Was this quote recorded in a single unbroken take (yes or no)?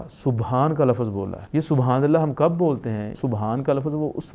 no